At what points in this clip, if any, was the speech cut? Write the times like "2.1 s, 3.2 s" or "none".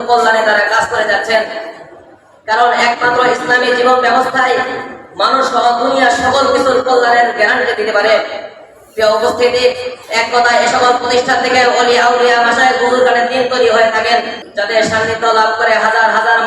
14.4 s